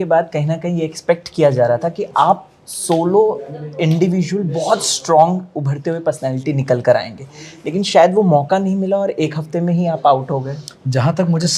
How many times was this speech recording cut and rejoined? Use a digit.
0